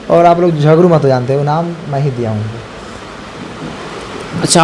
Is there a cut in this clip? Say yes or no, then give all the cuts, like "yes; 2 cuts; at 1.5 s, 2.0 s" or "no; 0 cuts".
no; 0 cuts